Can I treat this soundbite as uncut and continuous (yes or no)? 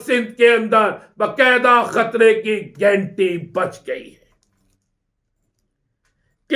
yes